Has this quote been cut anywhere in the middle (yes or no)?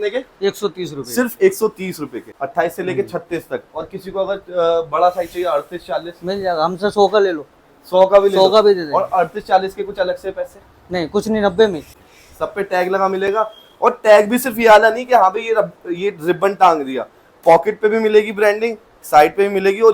yes